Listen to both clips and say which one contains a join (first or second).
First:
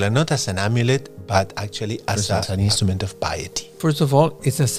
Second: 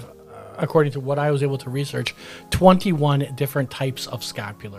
first